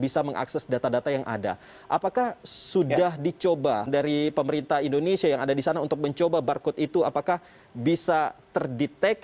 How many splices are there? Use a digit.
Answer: 1